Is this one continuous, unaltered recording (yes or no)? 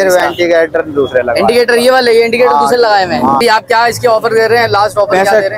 no